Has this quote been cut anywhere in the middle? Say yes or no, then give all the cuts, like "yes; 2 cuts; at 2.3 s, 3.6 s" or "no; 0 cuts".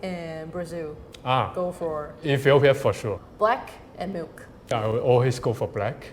yes; 2 cuts; at 3.2 s, 4.7 s